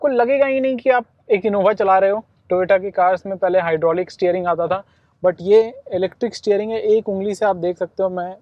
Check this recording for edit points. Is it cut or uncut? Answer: uncut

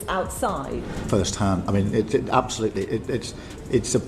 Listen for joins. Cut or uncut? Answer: cut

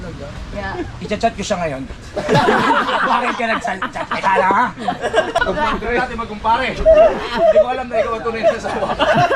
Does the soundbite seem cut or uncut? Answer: cut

